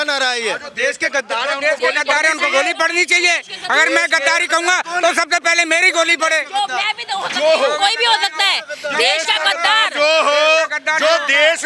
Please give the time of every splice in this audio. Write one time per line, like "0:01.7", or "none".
none